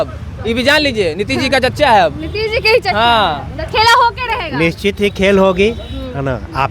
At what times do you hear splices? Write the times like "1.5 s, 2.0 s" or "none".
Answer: none